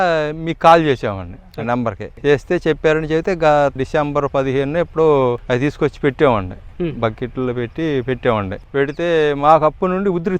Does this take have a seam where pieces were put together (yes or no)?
yes